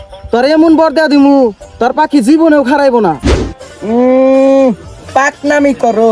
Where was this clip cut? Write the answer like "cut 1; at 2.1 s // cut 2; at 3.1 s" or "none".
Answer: cut 1; at 3.4 s